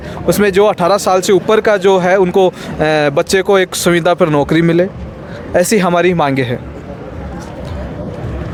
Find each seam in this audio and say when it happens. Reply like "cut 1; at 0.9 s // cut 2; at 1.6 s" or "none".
none